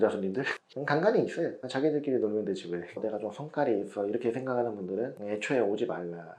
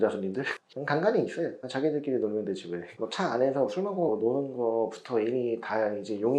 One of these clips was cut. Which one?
first; 1 cut; at 2.9 s

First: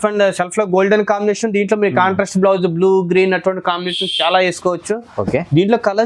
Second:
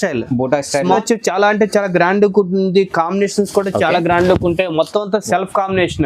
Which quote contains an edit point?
second; 1 cut; at 1.0 s

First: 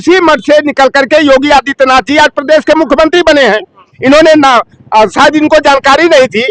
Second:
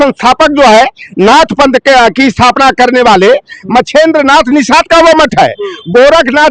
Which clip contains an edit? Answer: first; 1 cut; at 3.8 s

